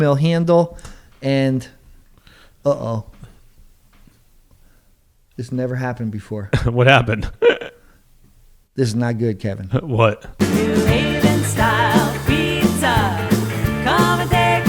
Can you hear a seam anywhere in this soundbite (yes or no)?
yes